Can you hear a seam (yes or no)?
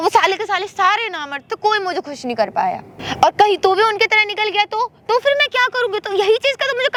no